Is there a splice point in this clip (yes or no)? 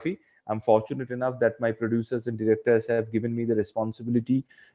no